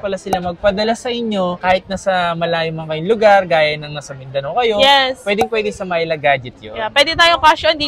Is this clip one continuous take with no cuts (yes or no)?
yes